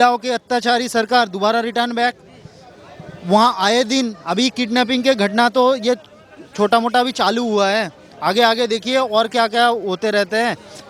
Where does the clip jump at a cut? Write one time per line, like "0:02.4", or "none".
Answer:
none